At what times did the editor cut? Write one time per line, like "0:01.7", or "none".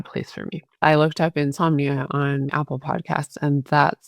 0:00.8
0:02.5